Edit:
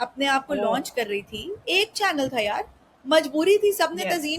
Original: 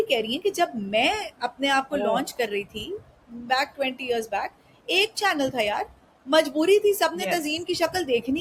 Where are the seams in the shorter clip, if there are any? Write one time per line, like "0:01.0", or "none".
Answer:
0:01.5